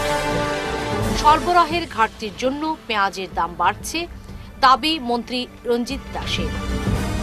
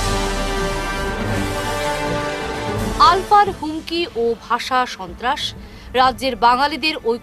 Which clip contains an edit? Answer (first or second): first